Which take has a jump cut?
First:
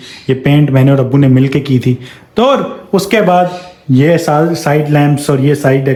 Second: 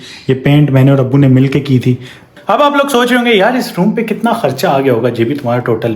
second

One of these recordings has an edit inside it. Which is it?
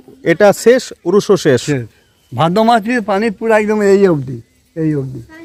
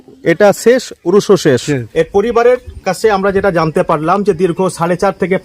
second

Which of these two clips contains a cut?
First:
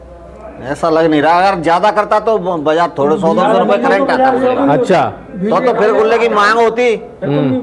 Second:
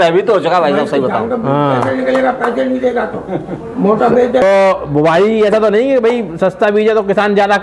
second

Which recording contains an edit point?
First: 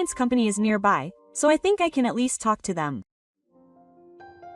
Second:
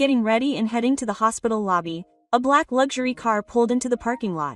first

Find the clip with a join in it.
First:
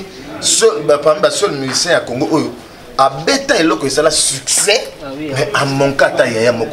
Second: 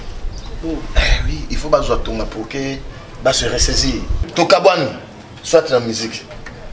second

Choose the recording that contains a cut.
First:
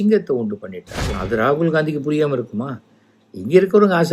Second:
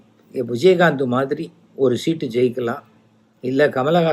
first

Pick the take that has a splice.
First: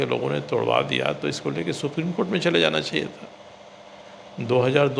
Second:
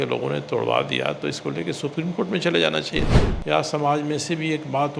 second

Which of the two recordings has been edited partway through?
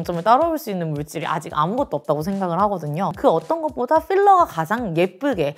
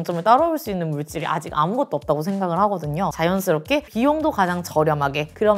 second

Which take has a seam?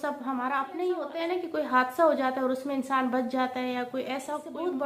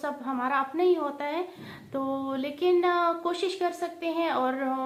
first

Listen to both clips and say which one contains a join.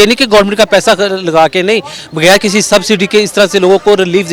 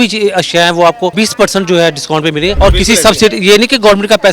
second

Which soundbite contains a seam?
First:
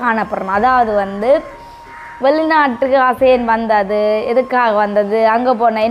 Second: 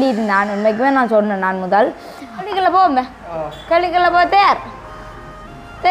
second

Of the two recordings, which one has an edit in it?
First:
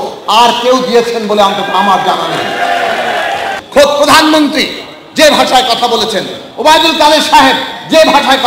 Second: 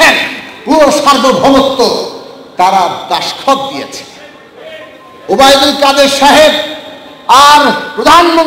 first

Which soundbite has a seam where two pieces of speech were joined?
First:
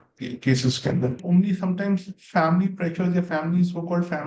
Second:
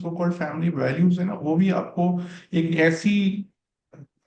first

